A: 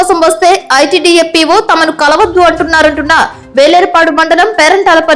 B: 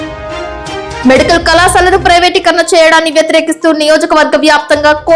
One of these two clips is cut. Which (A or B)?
B